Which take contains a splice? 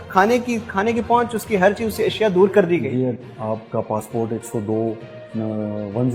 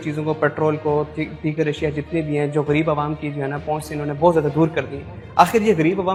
first; 1 cut; at 3.2 s

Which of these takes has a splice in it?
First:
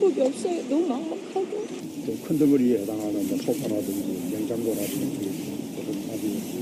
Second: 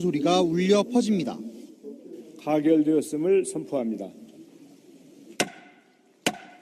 second; 1 cut; at 4.2 s

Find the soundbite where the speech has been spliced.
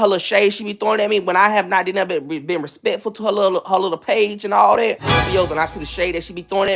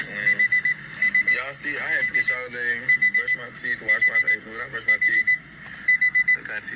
first; 1 cut; at 5.3 s

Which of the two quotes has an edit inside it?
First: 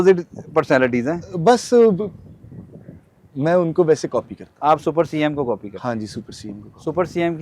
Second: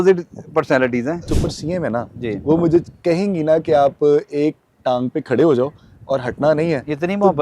second; 1 cut; at 1.3 s

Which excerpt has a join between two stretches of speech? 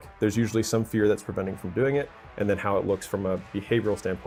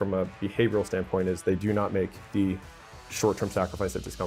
second; 1 cut; at 2.2 s

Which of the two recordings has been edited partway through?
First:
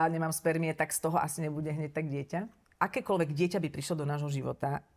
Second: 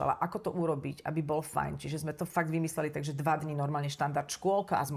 first; 1 cut; at 2.6 s

